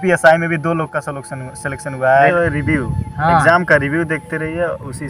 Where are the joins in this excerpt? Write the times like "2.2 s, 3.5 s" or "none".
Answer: 2.3 s

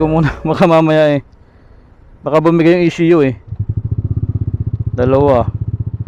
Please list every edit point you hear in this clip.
none

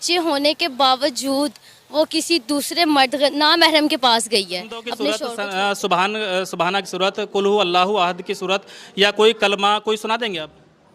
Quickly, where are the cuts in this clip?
5.2 s

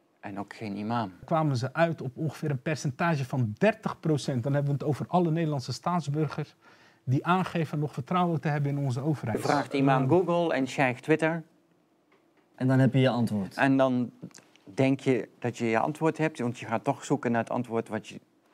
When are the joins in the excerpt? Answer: 1.2 s, 9.4 s

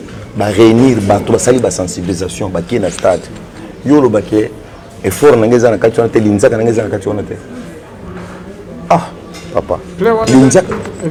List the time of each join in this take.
none

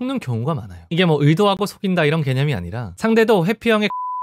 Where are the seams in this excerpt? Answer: 2.8 s

